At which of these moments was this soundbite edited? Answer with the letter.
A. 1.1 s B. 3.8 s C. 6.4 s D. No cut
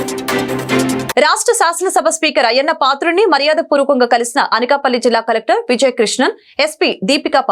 A